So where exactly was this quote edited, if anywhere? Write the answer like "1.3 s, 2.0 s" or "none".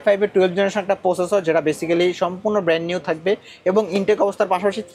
none